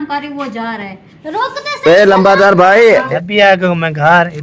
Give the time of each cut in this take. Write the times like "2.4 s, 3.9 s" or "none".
3.1 s